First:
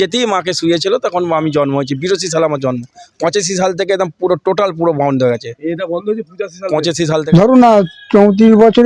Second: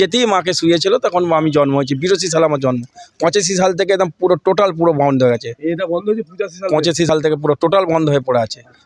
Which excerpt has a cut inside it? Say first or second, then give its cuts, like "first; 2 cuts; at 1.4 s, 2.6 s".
first; 1 cut; at 7.1 s